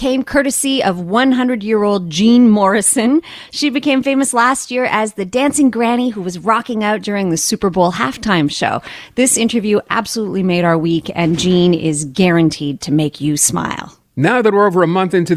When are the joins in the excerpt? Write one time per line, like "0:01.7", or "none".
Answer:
0:13.9